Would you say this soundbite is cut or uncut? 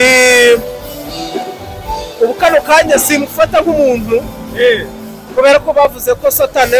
uncut